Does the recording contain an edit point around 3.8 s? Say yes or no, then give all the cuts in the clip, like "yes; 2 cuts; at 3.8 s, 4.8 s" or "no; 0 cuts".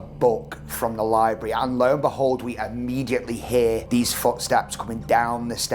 yes; 1 cut; at 3.8 s